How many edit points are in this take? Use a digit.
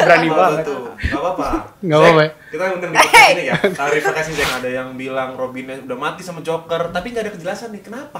1